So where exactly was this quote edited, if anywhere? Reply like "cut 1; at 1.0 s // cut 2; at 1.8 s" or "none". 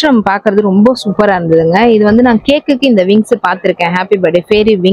none